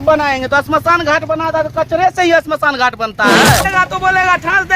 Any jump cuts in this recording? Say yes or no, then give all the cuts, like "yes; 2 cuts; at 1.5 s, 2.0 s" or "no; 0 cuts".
yes; 1 cut; at 3.7 s